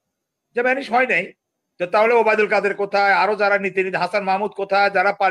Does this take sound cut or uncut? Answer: uncut